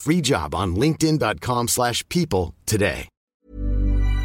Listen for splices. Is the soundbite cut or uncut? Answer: cut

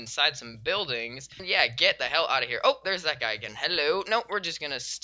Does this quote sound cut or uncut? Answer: cut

